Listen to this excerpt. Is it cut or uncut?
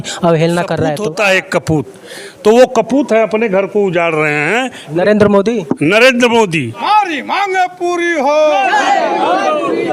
cut